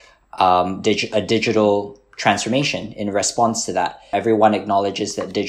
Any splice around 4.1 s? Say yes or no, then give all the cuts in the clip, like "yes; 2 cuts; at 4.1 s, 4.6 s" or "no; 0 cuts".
yes; 1 cut; at 4.1 s